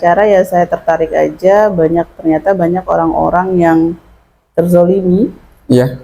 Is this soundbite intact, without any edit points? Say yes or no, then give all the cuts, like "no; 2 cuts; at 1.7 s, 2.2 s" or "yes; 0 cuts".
yes; 0 cuts